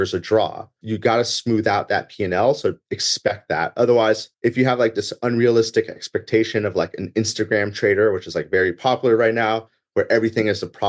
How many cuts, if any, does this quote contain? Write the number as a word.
two